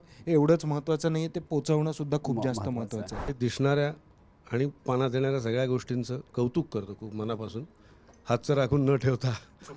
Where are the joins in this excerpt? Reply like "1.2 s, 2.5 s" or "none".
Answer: 3.4 s